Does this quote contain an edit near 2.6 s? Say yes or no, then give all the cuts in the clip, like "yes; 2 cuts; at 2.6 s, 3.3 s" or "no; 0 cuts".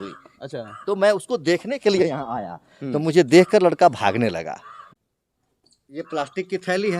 no; 1 cut; at 4.8 s